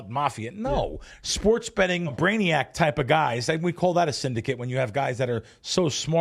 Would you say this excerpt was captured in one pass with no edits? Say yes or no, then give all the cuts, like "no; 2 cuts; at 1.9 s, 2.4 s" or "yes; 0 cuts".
no; 1 cut; at 2.1 s